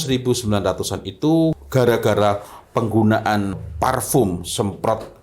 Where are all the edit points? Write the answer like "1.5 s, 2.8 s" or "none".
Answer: 1.6 s, 3.6 s